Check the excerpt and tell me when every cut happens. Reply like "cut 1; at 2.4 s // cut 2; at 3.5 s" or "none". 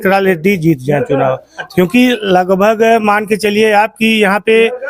none